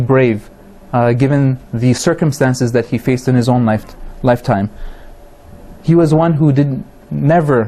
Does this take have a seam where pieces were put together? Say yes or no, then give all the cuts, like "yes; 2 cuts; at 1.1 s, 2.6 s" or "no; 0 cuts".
yes; 1 cut; at 6.4 s